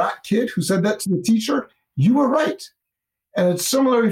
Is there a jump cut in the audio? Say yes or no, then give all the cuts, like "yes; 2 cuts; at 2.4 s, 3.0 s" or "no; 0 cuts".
no; 0 cuts